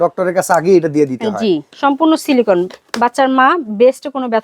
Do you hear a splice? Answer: yes; 2 cuts; at 1.7 s, 2.8 s

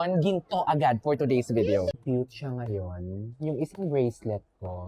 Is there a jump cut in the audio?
yes; 1 cut; at 2.0 s

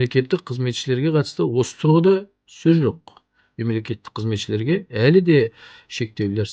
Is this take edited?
no; 0 cuts

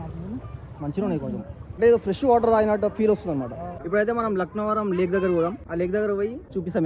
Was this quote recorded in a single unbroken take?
no; 2 cuts; at 1.6 s, 3.7 s

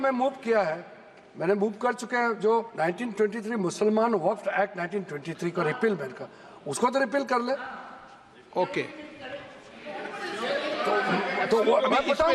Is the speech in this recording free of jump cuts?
yes; 0 cuts

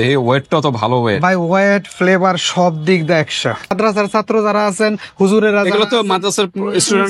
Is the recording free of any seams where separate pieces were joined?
no; 1 cut; at 3.7 s

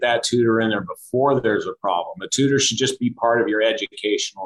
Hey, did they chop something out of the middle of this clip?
no; 0 cuts

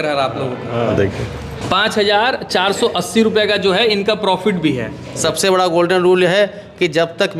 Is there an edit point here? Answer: yes; 2 cuts; at 0.9 s, 5.2 s

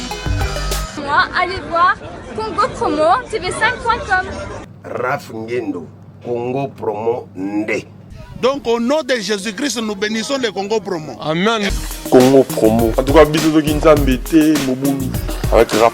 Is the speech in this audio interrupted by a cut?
yes; 1 cut; at 1.0 s

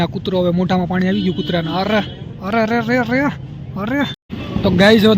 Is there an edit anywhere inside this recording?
yes; 1 cut; at 4.3 s

